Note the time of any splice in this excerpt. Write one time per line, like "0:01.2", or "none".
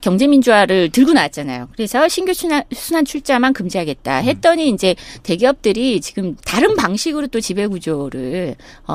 none